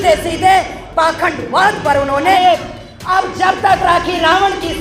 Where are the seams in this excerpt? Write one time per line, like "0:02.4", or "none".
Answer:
0:02.4